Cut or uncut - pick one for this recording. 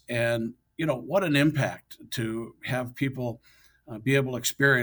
uncut